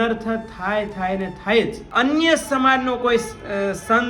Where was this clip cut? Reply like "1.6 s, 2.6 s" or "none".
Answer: 1.8 s